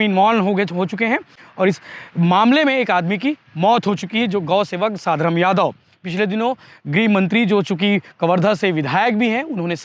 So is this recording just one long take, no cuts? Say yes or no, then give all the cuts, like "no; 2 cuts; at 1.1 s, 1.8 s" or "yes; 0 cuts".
yes; 0 cuts